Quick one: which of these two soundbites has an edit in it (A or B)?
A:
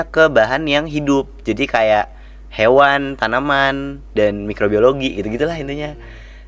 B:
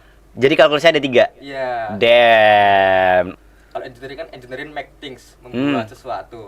B